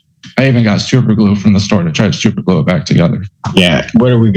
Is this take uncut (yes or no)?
no